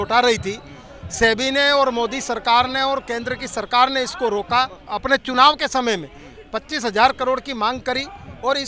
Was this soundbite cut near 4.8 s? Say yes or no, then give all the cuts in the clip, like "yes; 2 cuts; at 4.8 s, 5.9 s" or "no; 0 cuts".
yes; 1 cut; at 4.8 s